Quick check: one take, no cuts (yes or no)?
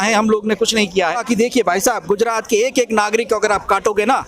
no